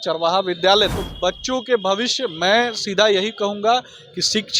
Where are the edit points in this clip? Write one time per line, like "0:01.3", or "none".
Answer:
0:01.0